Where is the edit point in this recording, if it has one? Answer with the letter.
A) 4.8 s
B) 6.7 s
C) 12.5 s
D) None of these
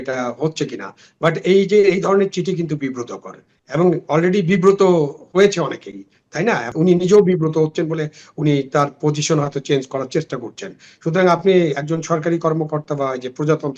B